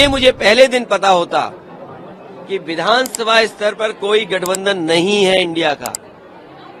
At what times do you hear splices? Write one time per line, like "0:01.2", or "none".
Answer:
none